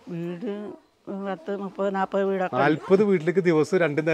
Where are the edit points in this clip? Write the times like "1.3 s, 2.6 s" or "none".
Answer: none